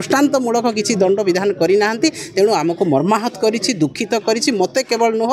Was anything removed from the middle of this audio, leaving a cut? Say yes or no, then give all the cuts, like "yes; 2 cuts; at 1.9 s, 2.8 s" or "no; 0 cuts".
no; 0 cuts